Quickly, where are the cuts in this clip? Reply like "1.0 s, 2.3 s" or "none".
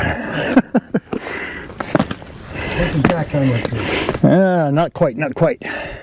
none